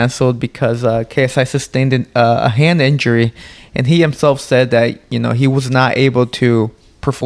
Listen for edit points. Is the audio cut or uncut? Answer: uncut